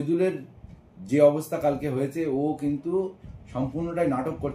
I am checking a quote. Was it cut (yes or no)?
no